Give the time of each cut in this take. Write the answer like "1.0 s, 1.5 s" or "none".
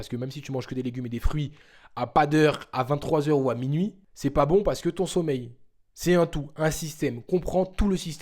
4.0 s